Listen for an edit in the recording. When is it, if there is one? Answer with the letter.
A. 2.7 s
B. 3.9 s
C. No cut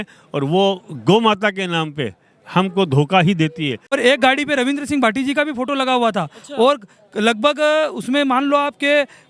B